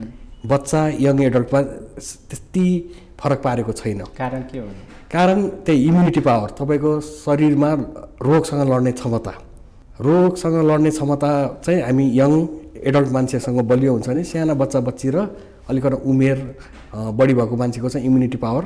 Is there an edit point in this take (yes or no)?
no